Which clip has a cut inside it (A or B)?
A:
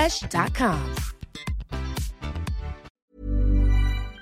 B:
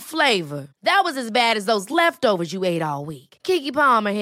A